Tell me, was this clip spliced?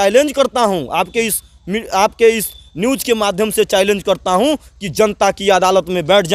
no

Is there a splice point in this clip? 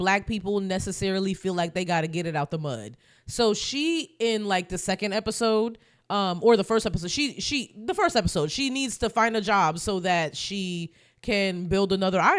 no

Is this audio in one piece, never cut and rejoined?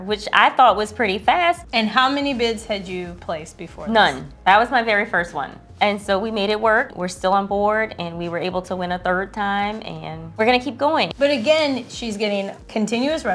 no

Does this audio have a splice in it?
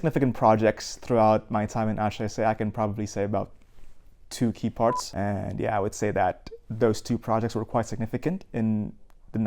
yes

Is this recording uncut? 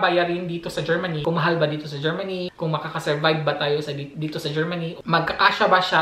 no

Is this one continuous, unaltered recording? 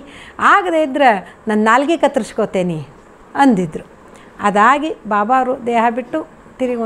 yes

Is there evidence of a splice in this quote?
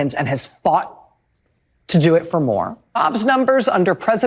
yes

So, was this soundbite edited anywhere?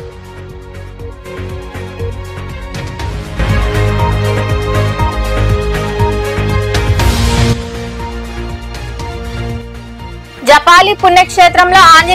yes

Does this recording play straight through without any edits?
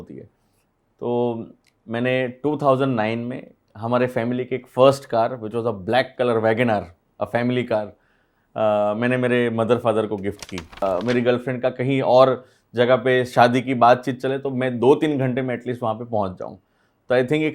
no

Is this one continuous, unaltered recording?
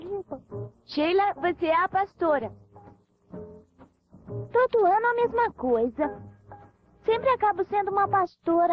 no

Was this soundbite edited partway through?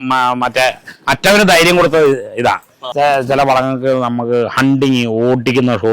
yes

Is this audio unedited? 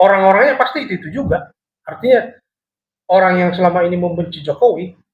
yes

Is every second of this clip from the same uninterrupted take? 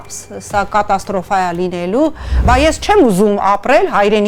no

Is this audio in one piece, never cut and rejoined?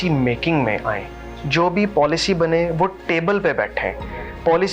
yes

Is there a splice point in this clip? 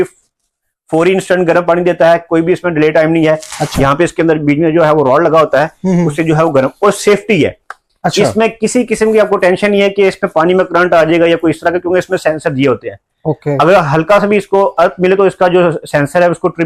no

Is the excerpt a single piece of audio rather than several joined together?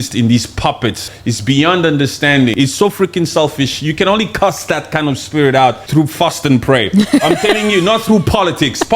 no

